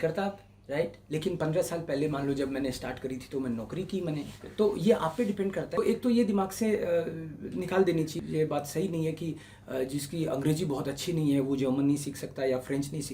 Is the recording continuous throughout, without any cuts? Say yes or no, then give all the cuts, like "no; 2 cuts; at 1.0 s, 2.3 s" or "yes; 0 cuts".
no; 2 cuts; at 5.7 s, 8.1 s